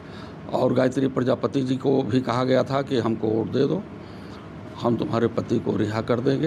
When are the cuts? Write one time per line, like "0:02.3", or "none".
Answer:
none